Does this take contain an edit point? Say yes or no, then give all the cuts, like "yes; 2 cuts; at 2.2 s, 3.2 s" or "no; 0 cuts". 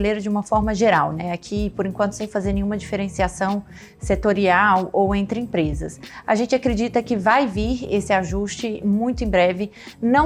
no; 0 cuts